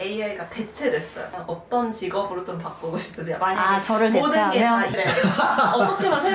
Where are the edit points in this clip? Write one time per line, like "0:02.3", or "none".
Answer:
0:01.3
0:04.9